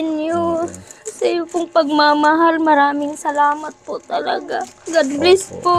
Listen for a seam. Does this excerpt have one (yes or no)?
no